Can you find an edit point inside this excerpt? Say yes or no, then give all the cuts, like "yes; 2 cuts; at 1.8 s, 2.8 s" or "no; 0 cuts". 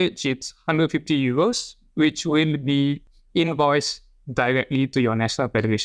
yes; 1 cut; at 3.1 s